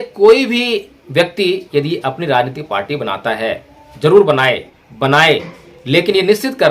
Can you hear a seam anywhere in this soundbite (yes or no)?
yes